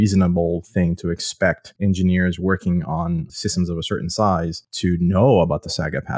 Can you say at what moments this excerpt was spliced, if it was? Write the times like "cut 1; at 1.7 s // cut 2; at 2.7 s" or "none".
cut 1; at 1.7 s // cut 2; at 3.3 s // cut 3; at 4.6 s